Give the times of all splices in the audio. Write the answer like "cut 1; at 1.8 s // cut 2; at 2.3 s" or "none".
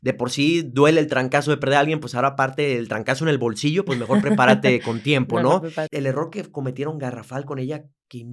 cut 1; at 5.9 s